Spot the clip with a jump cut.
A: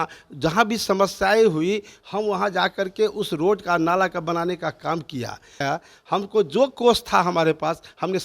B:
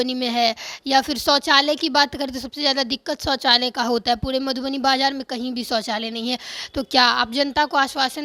A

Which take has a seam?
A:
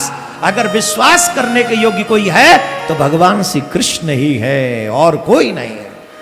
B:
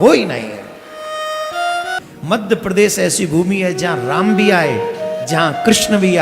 B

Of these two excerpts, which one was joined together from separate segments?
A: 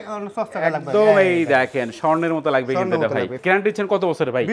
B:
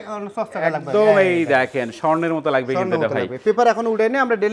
A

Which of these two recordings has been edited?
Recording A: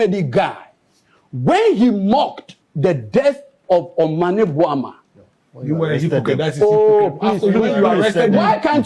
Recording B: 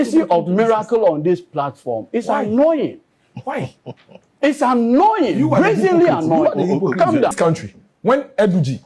B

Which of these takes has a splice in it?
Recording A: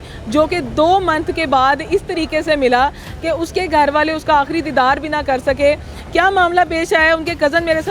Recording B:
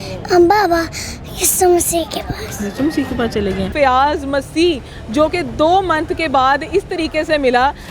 B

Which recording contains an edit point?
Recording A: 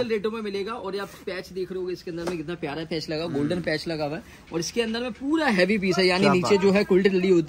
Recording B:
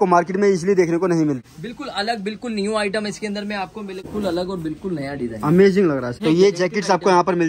B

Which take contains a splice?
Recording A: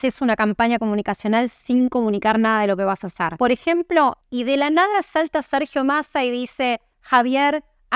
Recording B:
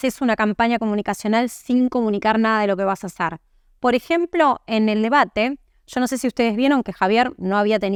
A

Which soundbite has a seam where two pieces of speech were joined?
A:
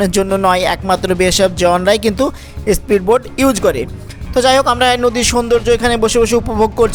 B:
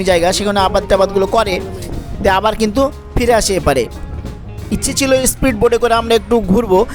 B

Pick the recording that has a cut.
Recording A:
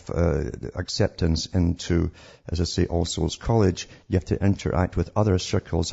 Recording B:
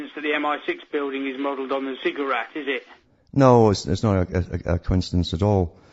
A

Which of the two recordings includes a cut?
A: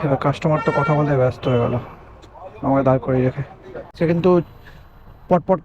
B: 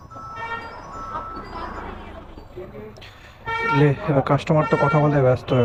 A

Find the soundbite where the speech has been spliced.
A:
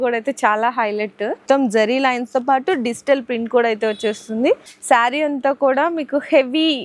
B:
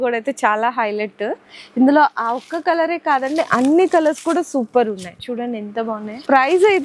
A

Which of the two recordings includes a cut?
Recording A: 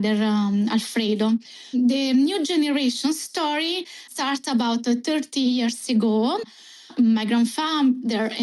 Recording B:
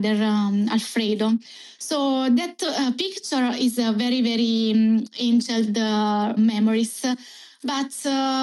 A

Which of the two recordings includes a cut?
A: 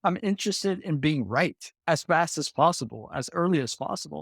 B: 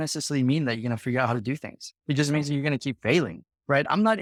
A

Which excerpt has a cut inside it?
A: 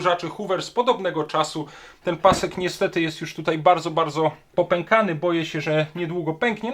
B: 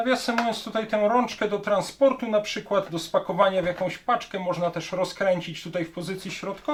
A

